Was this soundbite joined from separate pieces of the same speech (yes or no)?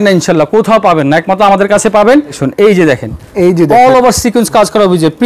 yes